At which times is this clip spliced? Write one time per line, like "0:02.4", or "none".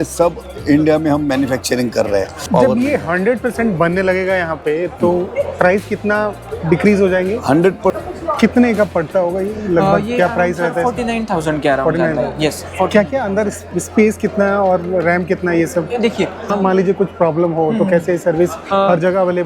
0:02.4
0:08.0
0:16.5